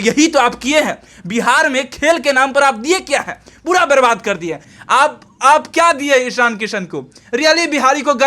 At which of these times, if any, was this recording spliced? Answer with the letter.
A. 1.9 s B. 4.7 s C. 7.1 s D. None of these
B